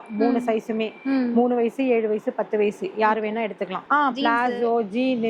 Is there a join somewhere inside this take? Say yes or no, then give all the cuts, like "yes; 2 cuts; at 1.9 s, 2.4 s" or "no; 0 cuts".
yes; 1 cut; at 3.8 s